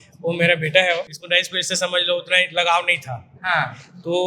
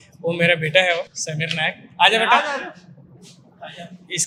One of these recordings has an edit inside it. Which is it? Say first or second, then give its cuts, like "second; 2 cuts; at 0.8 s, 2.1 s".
first; 1 cut; at 1.1 s